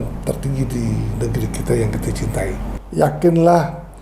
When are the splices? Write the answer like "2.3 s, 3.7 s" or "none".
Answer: 2.7 s